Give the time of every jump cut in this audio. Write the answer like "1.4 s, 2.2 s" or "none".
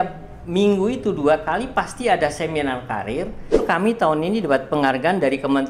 3.6 s